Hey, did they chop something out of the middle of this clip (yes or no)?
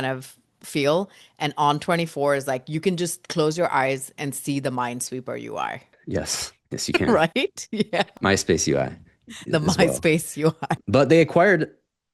no